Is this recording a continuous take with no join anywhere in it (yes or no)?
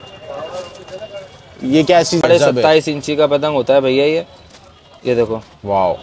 no